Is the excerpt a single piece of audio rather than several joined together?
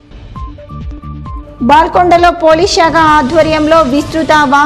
no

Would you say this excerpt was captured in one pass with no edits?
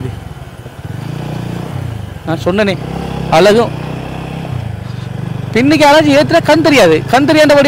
yes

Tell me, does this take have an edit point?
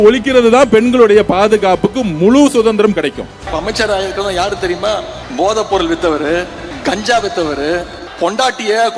yes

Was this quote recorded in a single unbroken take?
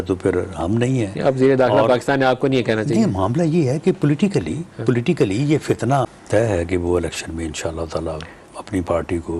no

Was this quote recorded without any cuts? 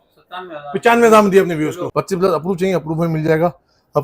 no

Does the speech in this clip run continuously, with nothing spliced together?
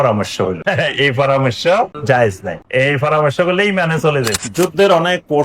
no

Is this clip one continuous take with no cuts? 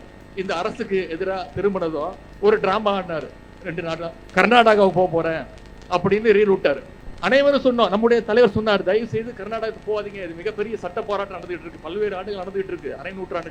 yes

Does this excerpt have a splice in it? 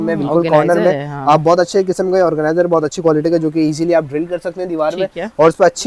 no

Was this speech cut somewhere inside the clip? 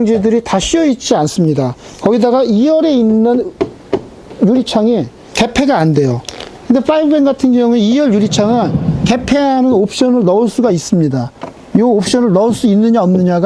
no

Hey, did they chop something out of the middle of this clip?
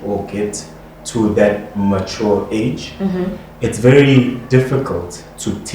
no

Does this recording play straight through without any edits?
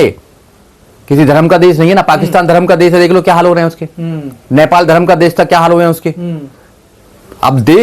yes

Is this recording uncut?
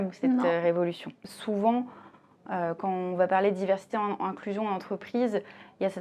no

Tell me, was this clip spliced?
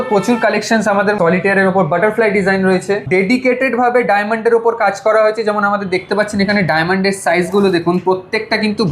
yes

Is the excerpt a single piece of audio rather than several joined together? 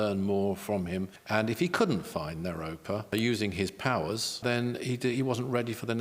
no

